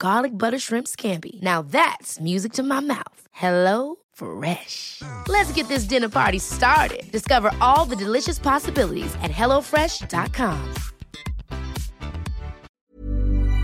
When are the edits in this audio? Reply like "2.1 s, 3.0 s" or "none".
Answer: 12.7 s